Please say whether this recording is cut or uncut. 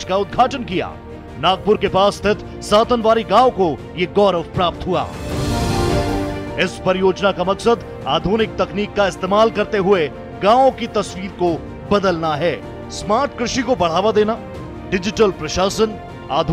uncut